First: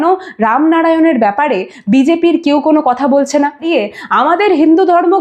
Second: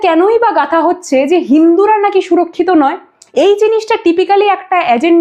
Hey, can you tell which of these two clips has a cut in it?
first; 1 cut; at 3.7 s

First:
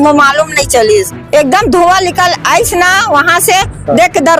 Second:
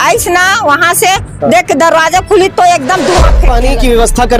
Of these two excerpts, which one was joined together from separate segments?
second; 1 cut; at 3.4 s

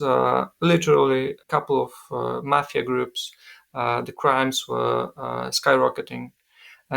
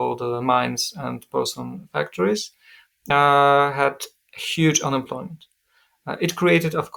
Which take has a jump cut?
first; 1 cut; at 1.4 s

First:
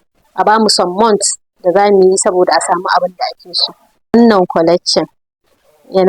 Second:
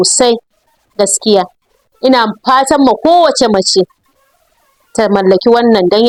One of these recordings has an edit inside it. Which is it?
first; 1 cut; at 4.1 s

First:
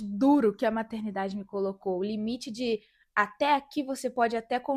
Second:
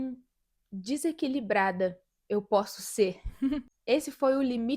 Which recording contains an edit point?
second; 1 cut; at 3.7 s

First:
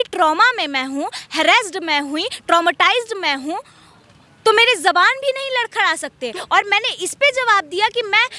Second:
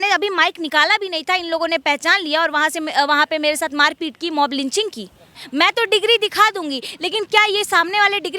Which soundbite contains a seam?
second; 1 cut; at 5.3 s

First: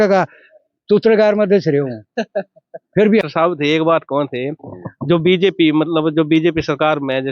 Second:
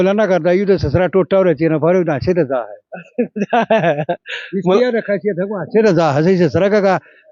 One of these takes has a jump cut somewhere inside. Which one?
first; 1 cut; at 3.3 s

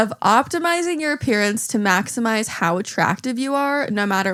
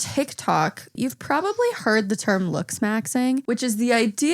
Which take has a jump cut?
second; 2 cuts; at 0.9 s, 3.4 s

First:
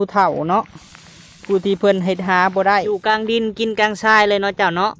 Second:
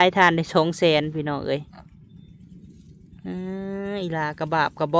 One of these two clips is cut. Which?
first; 1 cut; at 2.9 s

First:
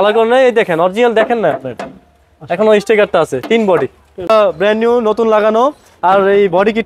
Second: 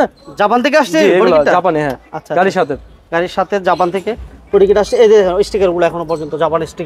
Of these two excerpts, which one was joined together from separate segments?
first; 1 cut; at 4.3 s

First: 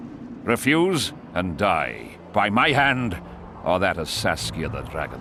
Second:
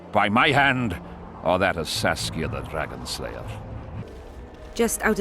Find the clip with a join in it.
second; 1 cut; at 4.0 s

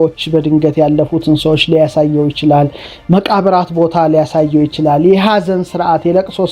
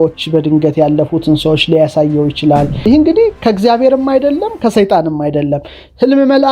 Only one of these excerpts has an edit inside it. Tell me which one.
second; 1 cut; at 2.8 s

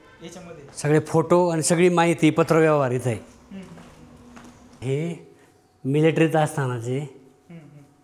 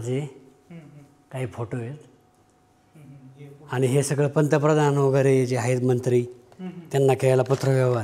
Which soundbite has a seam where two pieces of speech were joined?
first; 1 cut; at 4.7 s

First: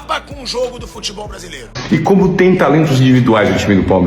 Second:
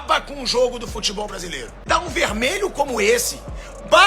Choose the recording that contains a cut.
first; 1 cut; at 1.7 s

